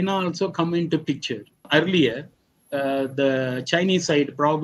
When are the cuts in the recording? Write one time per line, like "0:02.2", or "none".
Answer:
0:01.7